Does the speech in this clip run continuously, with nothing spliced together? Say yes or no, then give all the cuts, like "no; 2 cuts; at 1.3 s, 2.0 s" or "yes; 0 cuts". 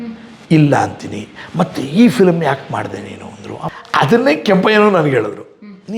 no; 1 cut; at 3.7 s